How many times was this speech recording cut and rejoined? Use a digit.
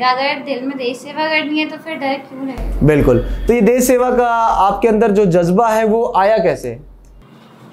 0